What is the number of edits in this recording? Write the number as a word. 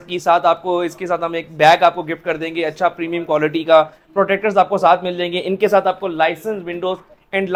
zero